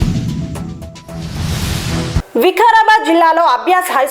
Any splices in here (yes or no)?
yes